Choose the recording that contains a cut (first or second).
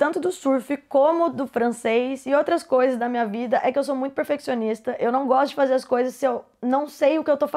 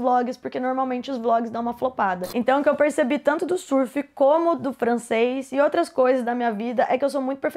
second